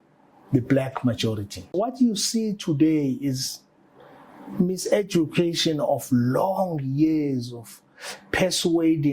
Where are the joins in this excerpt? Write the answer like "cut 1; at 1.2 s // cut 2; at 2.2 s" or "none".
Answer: cut 1; at 1.8 s